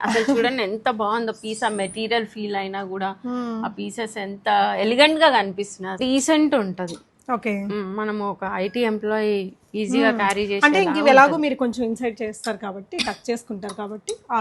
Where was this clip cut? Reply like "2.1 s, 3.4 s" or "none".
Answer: 6.0 s

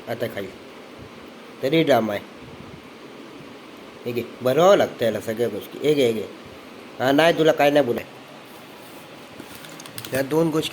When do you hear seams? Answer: 8.0 s

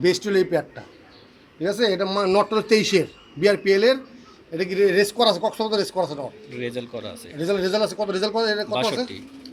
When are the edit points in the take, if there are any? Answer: none

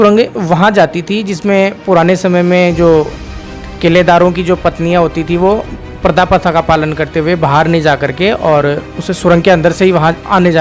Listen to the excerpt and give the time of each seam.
none

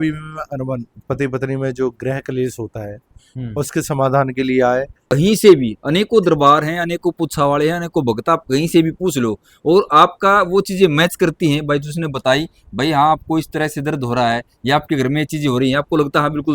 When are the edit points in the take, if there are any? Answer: 5.0 s

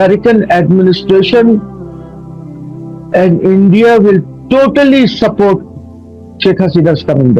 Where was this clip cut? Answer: none

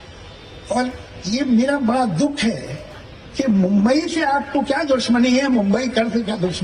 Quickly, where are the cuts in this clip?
none

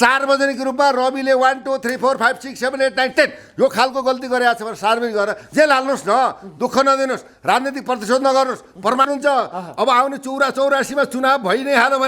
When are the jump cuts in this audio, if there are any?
9.1 s

